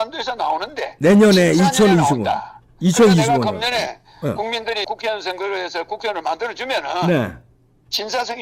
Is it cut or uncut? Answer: uncut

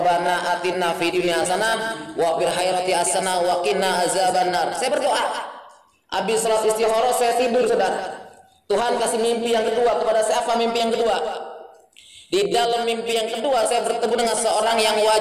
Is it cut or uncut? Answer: uncut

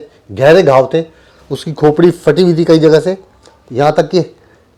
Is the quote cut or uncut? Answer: uncut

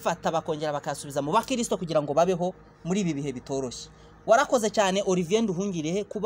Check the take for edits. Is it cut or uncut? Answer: uncut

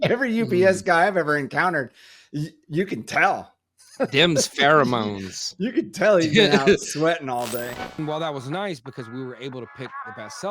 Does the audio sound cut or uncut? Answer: cut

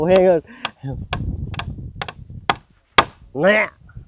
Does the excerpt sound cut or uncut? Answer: cut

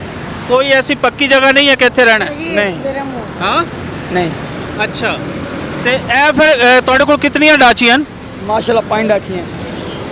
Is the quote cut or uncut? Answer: uncut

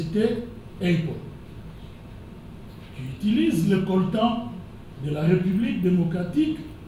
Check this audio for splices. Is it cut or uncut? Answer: uncut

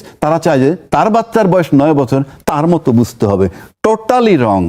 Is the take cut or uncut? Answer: uncut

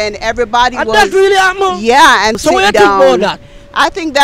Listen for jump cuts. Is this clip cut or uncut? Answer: cut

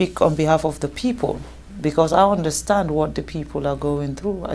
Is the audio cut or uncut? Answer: uncut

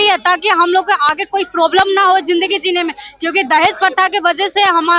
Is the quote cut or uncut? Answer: uncut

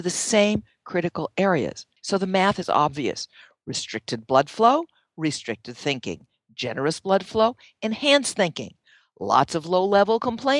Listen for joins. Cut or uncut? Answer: cut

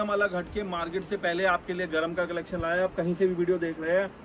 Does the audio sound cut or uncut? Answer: uncut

